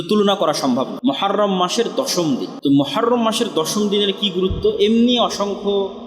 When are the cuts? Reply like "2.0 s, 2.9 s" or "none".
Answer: 0.9 s, 2.5 s